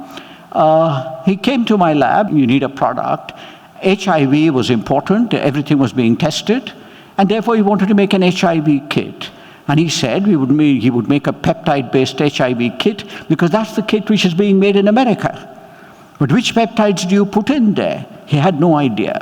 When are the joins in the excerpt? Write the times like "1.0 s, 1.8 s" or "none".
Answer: 2.3 s